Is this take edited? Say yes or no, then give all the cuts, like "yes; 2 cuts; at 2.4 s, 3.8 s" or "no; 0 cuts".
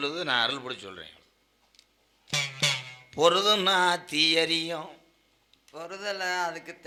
no; 0 cuts